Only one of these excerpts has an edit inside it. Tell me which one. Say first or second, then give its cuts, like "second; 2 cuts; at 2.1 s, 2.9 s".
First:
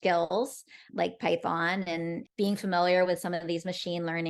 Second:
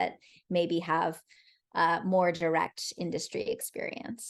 first; 2 cuts; at 0.8 s, 2.2 s